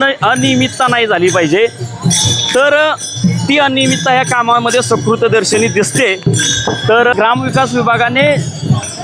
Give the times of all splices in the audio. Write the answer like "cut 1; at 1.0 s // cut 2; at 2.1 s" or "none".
cut 1; at 7.1 s

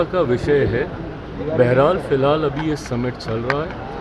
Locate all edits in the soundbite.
none

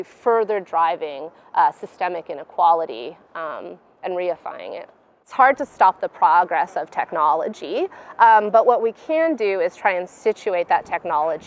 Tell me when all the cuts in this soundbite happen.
cut 1; at 5.3 s

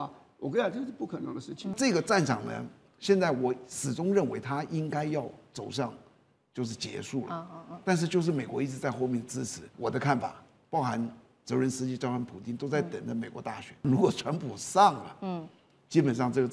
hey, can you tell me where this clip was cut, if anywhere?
cut 1; at 1.8 s // cut 2; at 9.6 s // cut 3; at 13.8 s

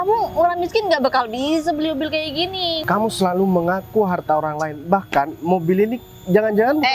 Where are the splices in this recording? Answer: cut 1; at 2.8 s

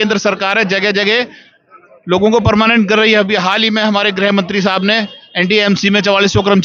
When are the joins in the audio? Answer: none

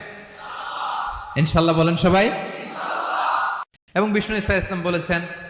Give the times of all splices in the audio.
cut 1; at 3.7 s

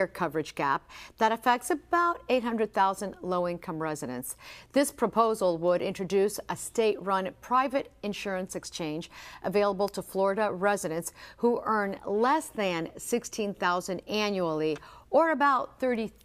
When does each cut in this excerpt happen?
cut 1; at 8.6 s

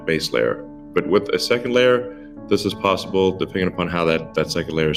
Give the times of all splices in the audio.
none

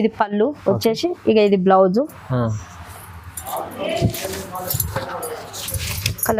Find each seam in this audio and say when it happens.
none

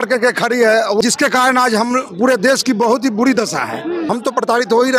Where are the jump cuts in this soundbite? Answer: cut 1; at 1.0 s // cut 2; at 4.1 s

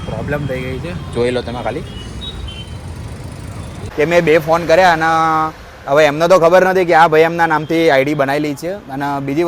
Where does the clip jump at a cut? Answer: cut 1; at 3.8 s

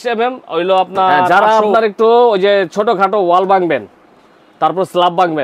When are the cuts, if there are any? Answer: cut 1; at 1.3 s

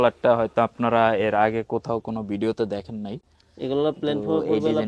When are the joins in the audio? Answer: none

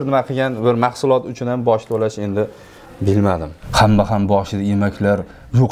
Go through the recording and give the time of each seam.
cut 1; at 3.6 s

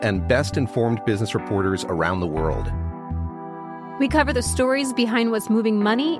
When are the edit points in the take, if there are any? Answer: none

